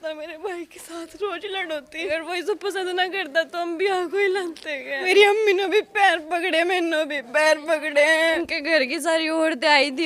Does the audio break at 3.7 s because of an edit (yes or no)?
no